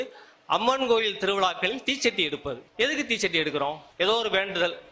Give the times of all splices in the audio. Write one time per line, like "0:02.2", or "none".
0:02.7
0:03.8